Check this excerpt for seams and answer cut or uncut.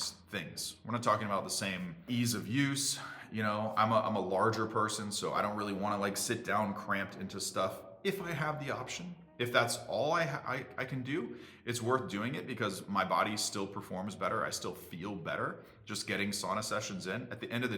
cut